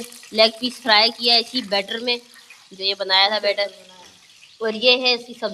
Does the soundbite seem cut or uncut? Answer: uncut